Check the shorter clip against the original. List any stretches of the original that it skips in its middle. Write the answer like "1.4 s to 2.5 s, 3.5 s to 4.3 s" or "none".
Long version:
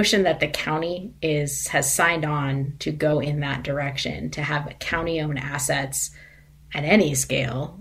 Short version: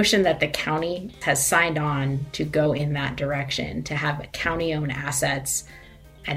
1.1 s to 1.6 s